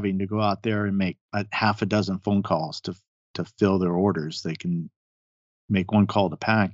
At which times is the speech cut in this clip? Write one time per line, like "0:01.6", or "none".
none

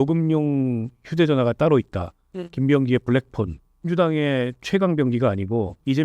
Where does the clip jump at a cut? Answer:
0:03.9

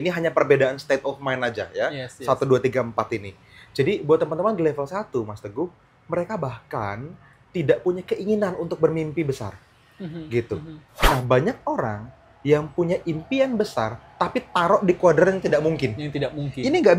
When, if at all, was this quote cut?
0:11.0

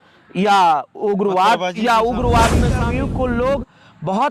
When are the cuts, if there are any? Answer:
0:02.8

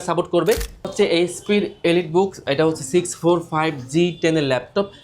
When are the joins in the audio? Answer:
0:00.9

